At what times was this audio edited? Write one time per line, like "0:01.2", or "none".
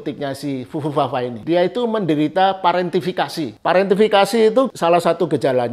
0:01.4
0:03.5
0:04.7